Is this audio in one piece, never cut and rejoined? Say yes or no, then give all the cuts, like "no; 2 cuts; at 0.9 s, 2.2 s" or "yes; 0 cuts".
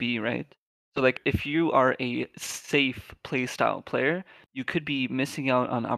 no; 1 cut; at 1.1 s